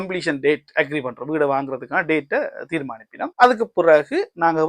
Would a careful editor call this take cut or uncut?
cut